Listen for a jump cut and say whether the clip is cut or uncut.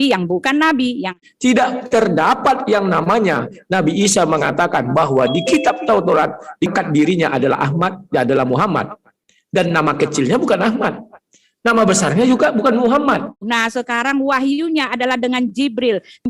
cut